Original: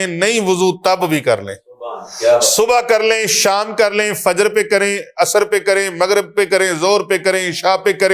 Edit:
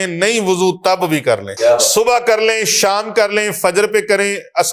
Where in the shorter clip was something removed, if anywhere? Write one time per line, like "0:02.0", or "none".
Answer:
0:01.5